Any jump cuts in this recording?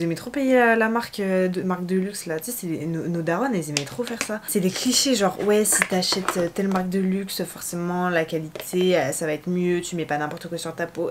no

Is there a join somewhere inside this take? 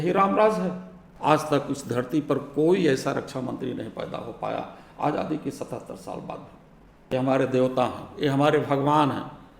yes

